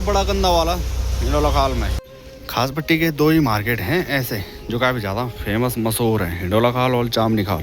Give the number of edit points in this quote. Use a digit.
1